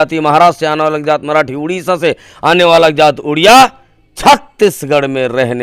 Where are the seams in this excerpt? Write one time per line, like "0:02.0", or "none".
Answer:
none